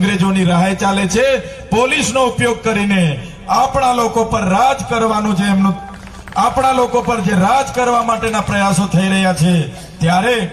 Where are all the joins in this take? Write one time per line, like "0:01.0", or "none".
none